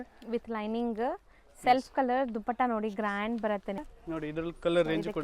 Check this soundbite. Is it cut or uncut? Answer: cut